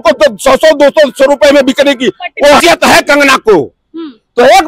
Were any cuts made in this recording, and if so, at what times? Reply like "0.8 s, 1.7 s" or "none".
2.6 s